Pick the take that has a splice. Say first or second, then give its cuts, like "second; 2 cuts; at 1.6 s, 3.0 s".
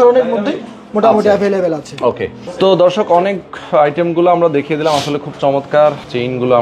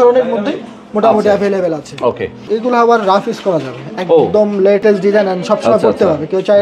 second; 2 cuts; at 2.3 s, 4.8 s